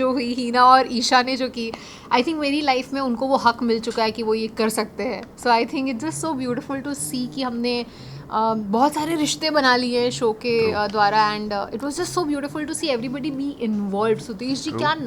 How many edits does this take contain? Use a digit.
0